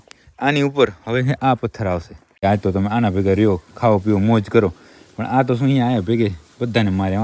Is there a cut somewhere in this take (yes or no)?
yes